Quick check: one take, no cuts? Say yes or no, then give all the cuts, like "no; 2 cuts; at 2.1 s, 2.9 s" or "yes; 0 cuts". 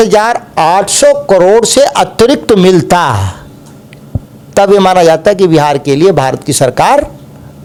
yes; 0 cuts